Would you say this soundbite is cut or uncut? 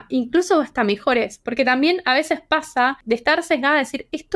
cut